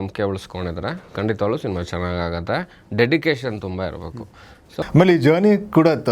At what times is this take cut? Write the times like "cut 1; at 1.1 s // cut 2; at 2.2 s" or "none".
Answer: cut 1; at 4.7 s